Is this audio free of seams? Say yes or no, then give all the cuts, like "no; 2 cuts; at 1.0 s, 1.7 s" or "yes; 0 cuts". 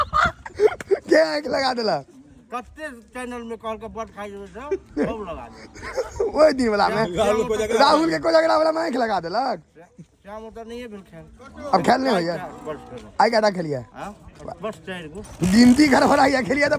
yes; 0 cuts